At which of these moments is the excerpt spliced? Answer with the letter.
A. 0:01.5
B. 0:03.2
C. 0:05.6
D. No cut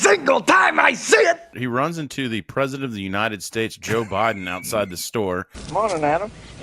A